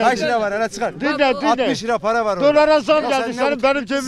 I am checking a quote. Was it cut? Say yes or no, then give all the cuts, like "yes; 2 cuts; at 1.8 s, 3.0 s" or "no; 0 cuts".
no; 0 cuts